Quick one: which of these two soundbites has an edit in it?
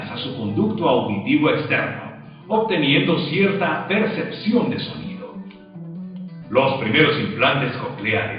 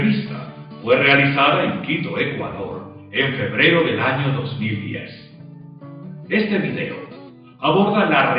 first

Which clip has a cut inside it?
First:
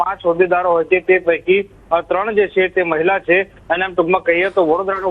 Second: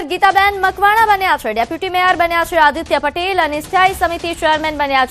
second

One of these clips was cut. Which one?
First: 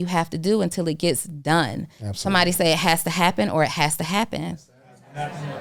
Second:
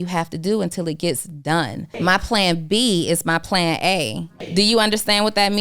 second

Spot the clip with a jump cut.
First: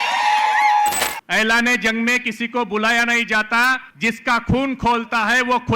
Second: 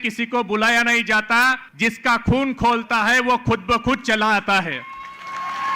first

